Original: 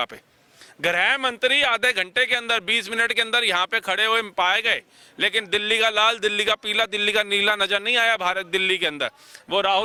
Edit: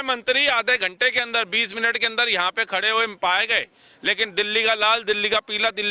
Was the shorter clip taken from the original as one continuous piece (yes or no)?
yes